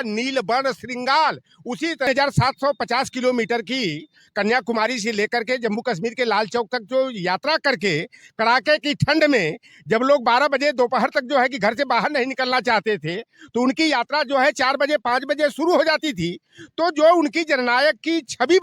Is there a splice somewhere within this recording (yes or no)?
yes